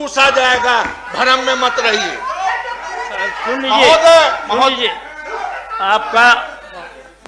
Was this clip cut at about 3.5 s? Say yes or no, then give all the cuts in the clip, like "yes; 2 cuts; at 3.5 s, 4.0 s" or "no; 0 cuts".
no; 0 cuts